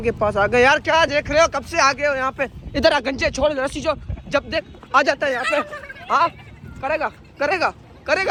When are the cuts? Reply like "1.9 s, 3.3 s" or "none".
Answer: none